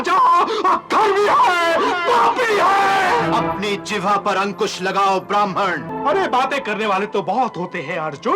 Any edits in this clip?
yes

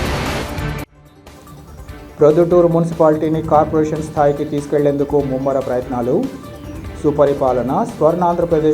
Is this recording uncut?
no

